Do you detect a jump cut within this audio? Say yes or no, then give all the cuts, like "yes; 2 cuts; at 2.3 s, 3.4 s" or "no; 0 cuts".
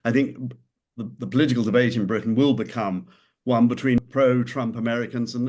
yes; 1 cut; at 4.1 s